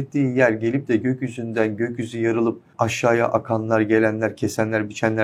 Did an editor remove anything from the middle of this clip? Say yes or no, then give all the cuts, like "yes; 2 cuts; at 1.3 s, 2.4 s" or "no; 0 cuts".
yes; 1 cut; at 2.7 s